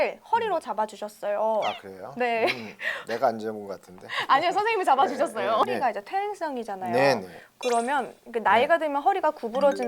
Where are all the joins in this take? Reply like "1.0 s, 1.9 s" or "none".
5.7 s